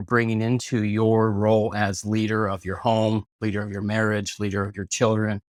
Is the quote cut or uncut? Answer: uncut